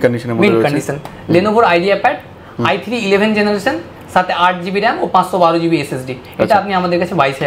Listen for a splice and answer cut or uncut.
uncut